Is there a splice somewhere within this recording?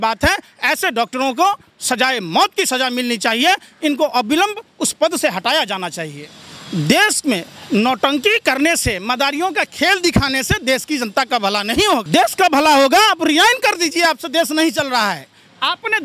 yes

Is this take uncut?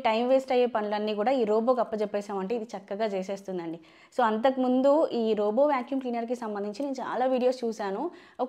yes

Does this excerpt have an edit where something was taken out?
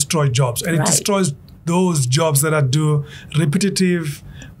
no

